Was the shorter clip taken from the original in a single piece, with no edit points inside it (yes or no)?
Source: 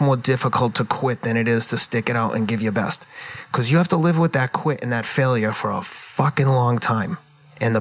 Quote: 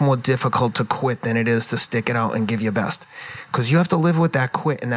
yes